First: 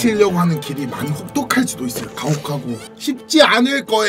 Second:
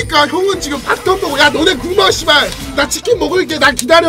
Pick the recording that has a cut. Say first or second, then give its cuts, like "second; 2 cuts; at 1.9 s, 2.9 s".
first; 1 cut; at 2.9 s